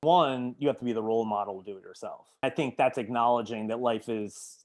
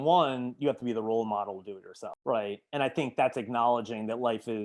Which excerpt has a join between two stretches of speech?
first; 1 cut; at 2.2 s

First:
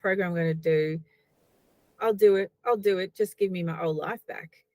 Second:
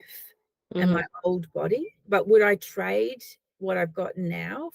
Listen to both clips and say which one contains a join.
second; 1 cut; at 1.9 s

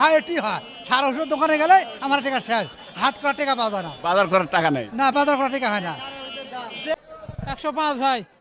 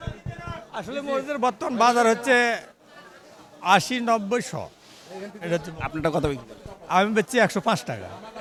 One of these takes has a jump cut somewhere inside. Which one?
first; 1 cut; at 6.9 s

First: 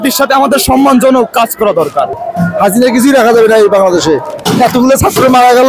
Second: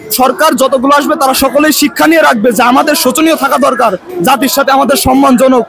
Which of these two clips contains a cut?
first; 2 cuts; at 2.2 s, 4.4 s

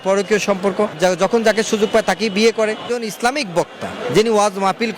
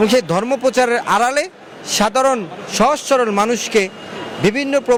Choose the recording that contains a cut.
first; 2 cuts; at 0.9 s, 2.8 s

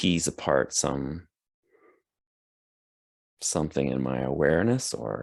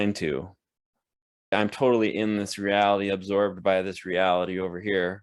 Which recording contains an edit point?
second; 1 cut; at 1.5 s

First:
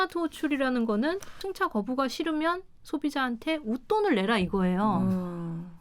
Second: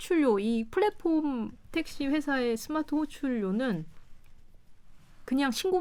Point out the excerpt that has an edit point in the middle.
first; 1 cut; at 1.4 s

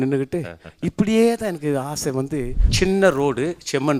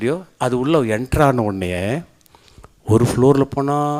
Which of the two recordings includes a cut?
first; 1 cut; at 2.6 s

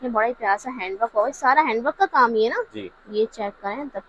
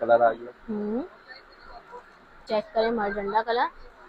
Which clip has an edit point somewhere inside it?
second; 1 cut; at 2.5 s

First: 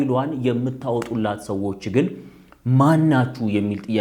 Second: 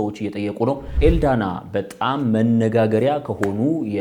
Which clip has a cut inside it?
second; 1 cut; at 0.9 s

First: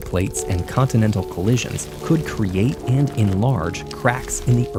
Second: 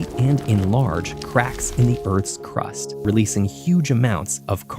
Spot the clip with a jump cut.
second; 1 cut; at 3.0 s

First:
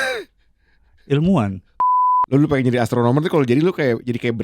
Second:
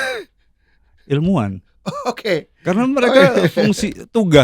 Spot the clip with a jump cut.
first; 1 cut; at 1.7 s

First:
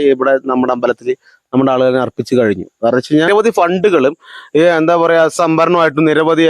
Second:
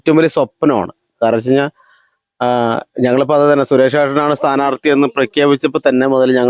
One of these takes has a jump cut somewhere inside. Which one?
first; 1 cut; at 3.3 s

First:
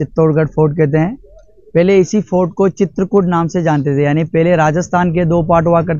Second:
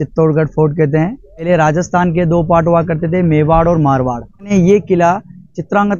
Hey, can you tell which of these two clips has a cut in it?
second; 2 cuts; at 1.5 s, 4.5 s

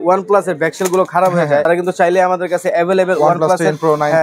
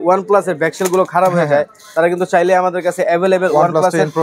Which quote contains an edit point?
first; 1 cut; at 1.6 s

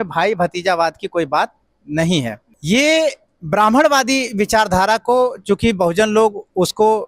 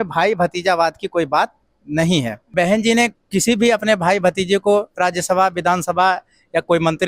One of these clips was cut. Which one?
second; 1 cut; at 2.5 s

